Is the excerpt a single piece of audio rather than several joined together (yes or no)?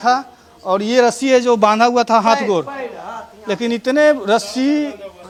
yes